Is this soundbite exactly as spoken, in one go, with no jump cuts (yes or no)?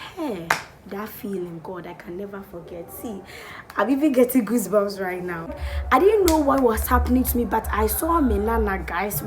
no